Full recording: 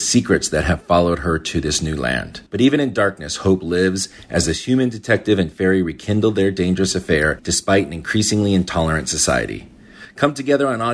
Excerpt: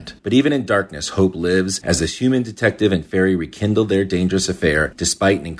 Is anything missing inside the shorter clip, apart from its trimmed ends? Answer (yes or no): yes